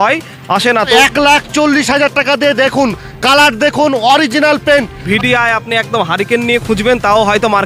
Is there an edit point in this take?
yes; 2 cuts; at 1.0 s, 5.0 s

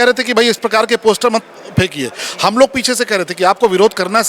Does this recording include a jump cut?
no; 0 cuts

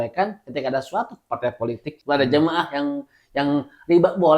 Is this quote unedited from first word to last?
no; 1 cut; at 1.9 s

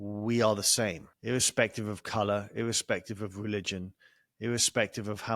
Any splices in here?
yes; 1 cut; at 1.1 s

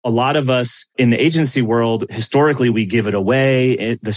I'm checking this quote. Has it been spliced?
yes; 2 cuts; at 0.9 s, 2.2 s

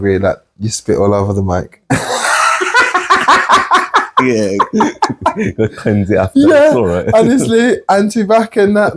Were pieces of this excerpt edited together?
no; 0 cuts

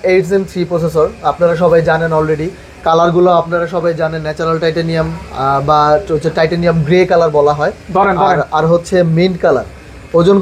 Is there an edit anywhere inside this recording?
no; 0 cuts

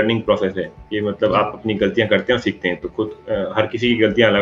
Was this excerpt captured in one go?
yes; 0 cuts

